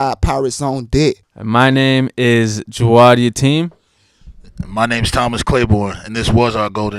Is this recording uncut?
no; 1 cut; at 1.3 s

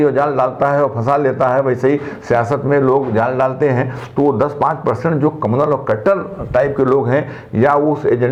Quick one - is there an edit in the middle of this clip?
no; 0 cuts

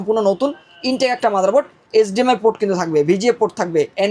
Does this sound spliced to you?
no; 0 cuts

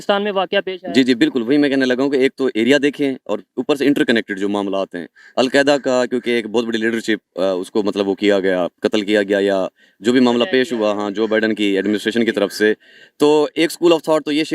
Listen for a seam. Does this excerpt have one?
no; 0 cuts

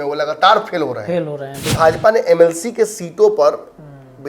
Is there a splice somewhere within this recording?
yes; 1 cut; at 1.6 s

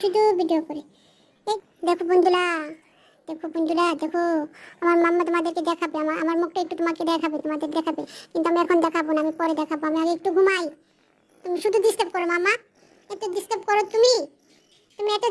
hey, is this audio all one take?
no; 1 cut; at 1.5 s

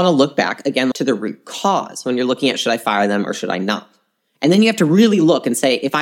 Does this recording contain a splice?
yes; 1 cut; at 0.9 s

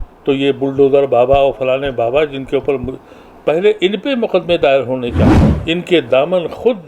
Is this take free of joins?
no; 1 cut; at 5.5 s

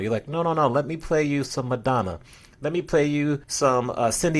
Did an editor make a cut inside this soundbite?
yes; 1 cut; at 3.5 s

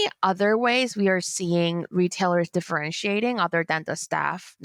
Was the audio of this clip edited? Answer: no; 0 cuts

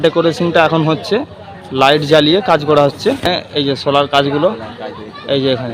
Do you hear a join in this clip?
yes; 1 cut; at 3.5 s

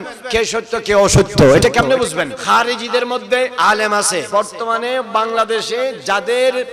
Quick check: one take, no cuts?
no; 2 cuts; at 2.4 s, 4.3 s

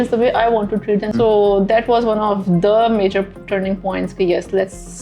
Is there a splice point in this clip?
yes; 1 cut; at 1.1 s

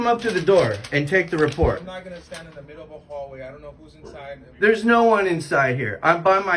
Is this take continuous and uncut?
yes; 0 cuts

